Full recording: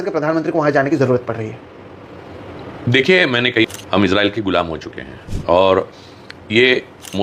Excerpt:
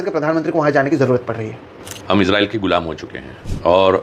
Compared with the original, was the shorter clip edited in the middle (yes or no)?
yes